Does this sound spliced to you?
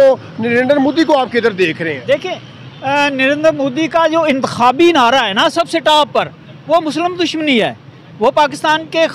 no; 0 cuts

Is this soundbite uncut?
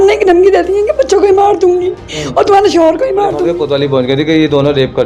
no; 1 cut; at 3.5 s

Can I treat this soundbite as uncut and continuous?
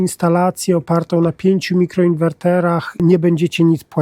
no; 1 cut; at 3.0 s

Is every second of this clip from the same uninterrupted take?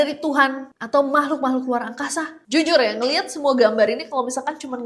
no; 1 cut; at 2.4 s

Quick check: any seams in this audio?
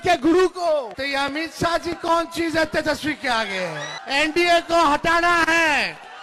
yes; 2 cuts; at 1.0 s, 3.9 s

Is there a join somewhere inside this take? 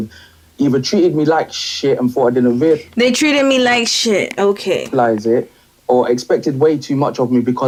no; 0 cuts

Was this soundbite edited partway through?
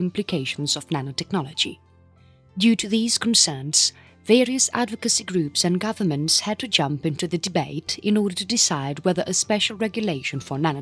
yes; 1 cut; at 8.8 s

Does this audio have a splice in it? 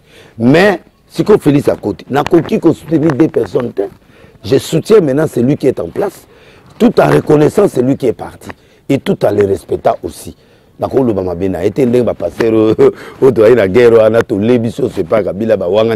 no; 0 cuts

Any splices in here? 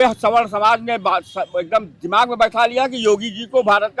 no; 0 cuts

